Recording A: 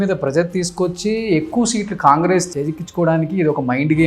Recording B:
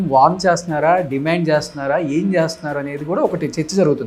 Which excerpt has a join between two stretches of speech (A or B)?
A